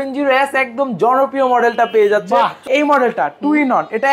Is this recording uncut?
no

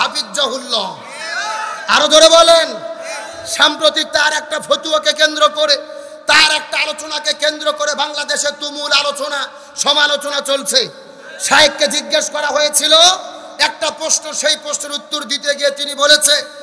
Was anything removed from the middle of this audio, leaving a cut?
no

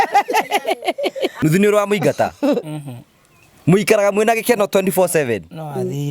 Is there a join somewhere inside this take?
yes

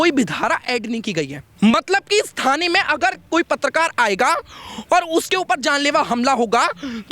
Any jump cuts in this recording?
yes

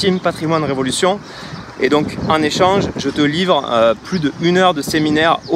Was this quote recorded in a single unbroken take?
yes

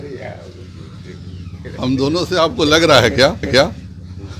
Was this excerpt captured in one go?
yes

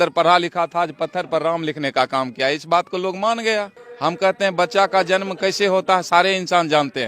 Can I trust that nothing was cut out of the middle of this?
yes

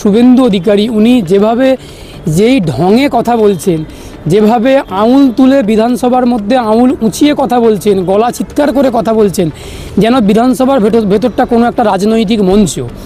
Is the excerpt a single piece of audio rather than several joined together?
yes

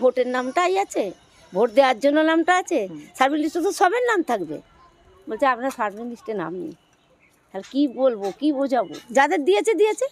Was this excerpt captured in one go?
yes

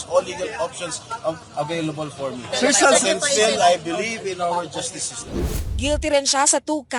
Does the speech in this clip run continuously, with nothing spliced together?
no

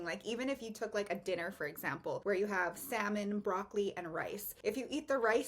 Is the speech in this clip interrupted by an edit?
yes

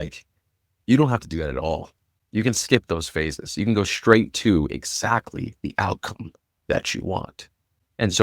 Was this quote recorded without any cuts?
yes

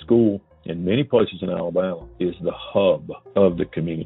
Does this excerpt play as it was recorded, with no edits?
no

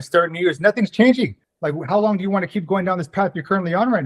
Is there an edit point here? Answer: yes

